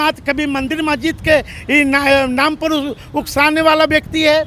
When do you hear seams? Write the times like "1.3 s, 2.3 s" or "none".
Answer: none